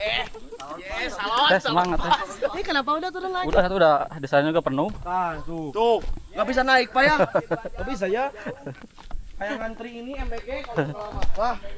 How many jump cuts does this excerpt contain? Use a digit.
0